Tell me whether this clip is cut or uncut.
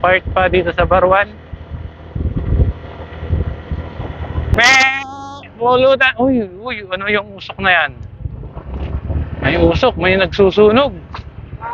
cut